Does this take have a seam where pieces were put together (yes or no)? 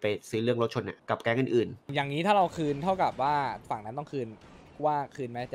yes